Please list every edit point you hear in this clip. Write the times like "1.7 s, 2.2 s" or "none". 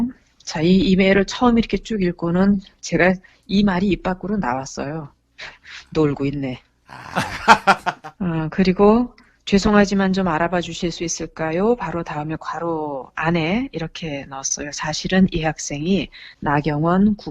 8.1 s